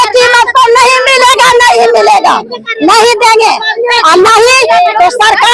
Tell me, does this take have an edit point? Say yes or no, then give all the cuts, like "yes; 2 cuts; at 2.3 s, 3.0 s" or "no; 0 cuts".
no; 0 cuts